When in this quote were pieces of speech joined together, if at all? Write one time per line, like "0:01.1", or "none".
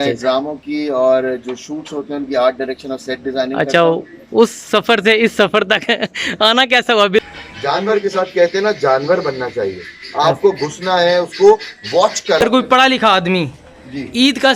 0:07.2
0:12.4